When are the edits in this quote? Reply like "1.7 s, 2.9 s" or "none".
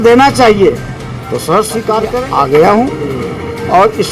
2.2 s